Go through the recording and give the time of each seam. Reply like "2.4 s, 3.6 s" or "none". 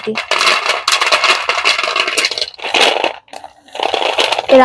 2.7 s